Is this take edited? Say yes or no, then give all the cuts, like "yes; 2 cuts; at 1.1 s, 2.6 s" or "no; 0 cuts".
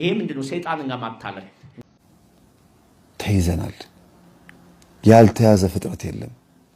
yes; 1 cut; at 1.6 s